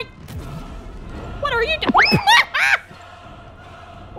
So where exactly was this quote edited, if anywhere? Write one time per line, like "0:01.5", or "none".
none